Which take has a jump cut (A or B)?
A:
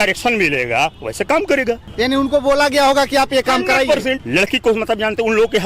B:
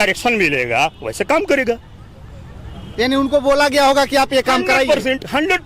A